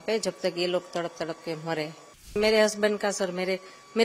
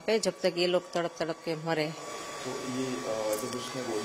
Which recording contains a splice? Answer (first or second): first